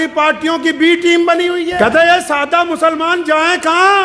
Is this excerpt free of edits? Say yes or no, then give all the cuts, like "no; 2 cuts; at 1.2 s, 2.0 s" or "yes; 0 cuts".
no; 1 cut; at 1.8 s